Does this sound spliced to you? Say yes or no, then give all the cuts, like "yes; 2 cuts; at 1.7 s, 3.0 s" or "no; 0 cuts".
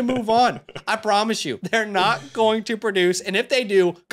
yes; 1 cut; at 1.5 s